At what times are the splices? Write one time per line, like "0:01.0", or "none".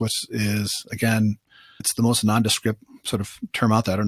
0:01.8